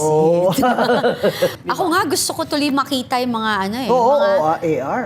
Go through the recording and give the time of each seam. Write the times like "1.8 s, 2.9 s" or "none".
1.5 s